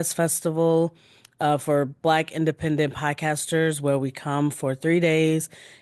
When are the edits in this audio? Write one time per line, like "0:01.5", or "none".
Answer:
none